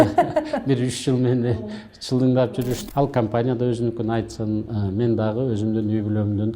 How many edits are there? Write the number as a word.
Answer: one